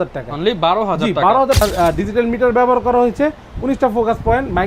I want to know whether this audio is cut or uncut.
cut